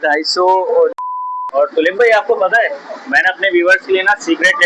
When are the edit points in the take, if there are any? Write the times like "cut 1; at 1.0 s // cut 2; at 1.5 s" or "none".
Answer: cut 1; at 1.0 s